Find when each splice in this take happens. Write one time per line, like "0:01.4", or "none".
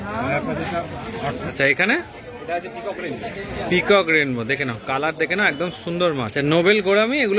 0:01.5
0:06.3